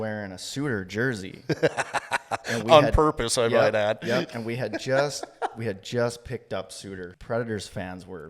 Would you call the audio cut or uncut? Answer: cut